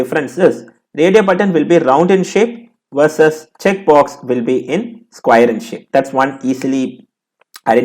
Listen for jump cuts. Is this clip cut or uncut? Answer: uncut